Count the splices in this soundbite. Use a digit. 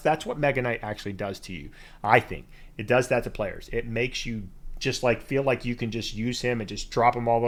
0